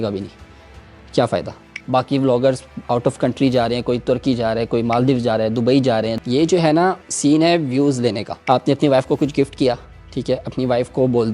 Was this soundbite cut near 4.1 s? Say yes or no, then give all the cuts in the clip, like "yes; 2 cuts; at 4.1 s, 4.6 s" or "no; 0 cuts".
no; 4 cuts; at 1.7 s, 6.2 s, 7.1 s, 8.3 s